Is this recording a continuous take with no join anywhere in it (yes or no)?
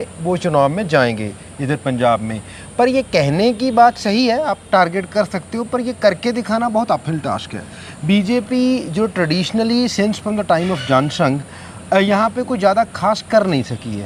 yes